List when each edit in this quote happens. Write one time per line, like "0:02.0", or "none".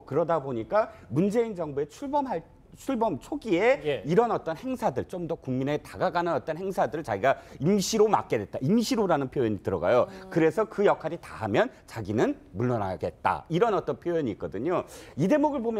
0:08.4